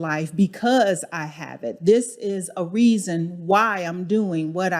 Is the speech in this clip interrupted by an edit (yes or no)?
no